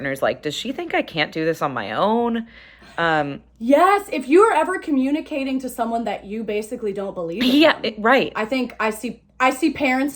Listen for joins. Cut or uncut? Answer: uncut